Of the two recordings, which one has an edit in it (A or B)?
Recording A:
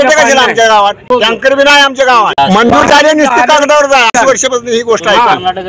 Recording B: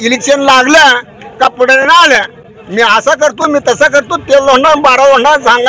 A